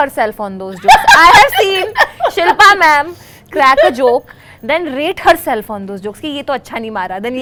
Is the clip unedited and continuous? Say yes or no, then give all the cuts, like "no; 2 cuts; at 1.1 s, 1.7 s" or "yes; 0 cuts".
yes; 0 cuts